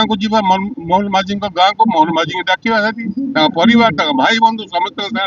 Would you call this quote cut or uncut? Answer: uncut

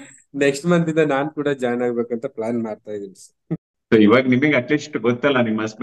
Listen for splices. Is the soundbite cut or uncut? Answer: uncut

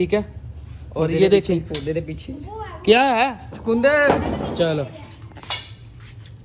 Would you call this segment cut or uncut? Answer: uncut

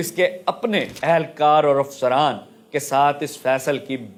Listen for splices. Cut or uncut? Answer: uncut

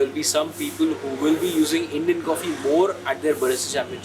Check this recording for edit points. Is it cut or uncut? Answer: uncut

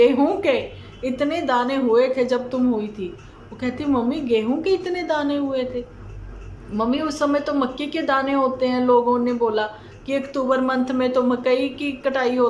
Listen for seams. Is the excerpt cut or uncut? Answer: uncut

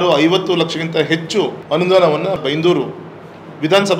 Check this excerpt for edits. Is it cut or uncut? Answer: cut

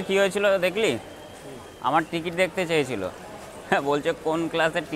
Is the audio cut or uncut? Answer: uncut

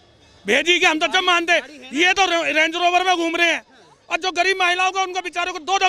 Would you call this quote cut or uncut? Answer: uncut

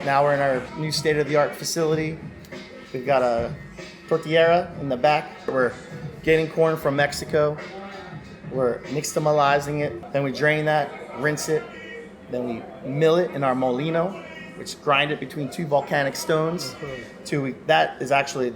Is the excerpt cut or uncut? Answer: cut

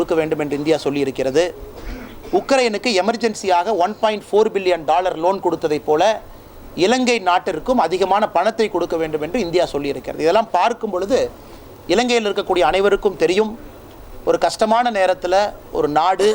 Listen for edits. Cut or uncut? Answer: uncut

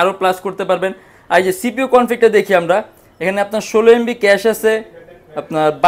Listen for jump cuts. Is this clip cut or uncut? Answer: uncut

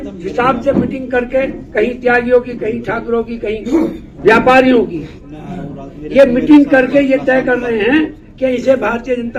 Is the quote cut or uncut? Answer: uncut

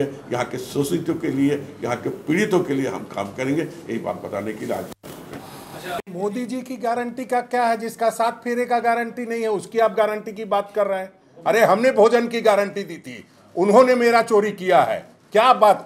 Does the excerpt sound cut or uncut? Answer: uncut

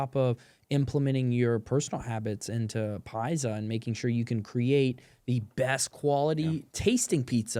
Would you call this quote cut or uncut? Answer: uncut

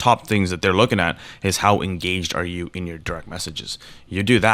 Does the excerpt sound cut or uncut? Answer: uncut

